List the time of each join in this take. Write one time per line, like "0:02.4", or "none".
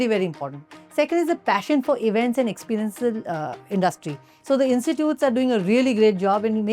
0:04.3